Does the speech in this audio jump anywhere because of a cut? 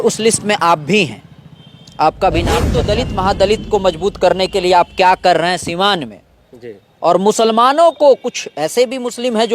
yes; 1 cut; at 2.7 s

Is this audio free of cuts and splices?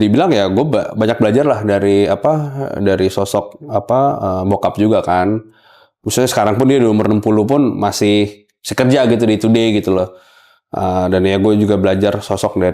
yes; 0 cuts

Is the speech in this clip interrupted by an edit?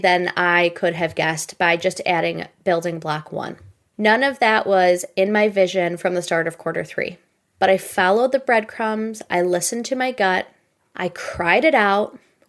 no; 0 cuts

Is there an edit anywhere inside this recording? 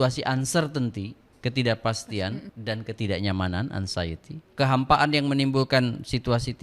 yes; 2 cuts; at 2.5 s, 4.4 s

